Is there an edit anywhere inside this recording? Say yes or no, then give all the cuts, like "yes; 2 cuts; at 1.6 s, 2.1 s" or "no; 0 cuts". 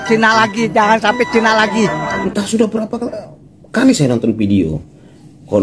yes; 1 cut; at 2.2 s